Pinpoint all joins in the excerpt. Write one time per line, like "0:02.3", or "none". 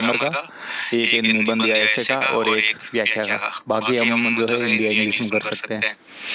none